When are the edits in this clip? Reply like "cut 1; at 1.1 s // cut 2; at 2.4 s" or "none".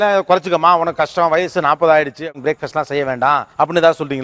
none